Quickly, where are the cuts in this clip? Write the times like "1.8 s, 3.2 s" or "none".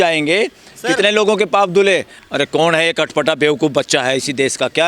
2.2 s